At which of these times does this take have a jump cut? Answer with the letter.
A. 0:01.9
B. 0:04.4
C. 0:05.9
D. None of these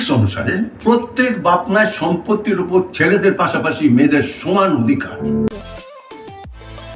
C